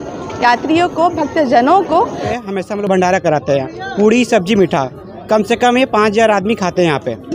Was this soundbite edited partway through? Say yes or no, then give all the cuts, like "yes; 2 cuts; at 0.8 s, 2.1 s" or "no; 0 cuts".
yes; 1 cut; at 2.4 s